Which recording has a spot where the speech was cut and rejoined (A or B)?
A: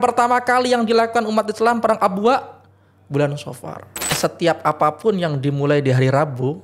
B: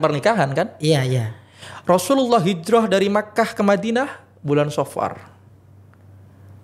A